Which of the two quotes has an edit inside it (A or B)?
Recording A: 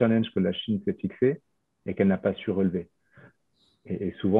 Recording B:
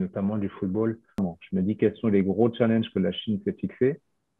B